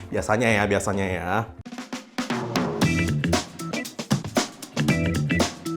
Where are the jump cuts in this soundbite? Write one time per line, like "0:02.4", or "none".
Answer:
none